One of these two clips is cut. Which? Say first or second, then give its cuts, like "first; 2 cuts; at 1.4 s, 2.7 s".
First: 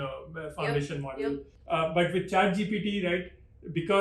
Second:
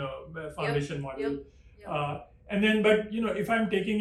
first; 1 cut; at 1.5 s